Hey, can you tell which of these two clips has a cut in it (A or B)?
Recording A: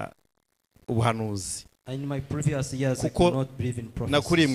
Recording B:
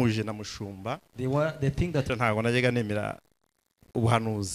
B